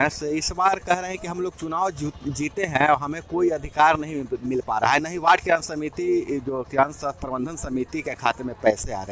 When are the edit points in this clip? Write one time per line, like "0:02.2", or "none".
none